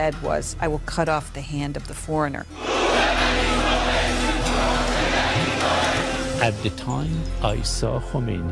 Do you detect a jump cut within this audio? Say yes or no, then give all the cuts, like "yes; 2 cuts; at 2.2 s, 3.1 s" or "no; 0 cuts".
yes; 1 cut; at 4.3 s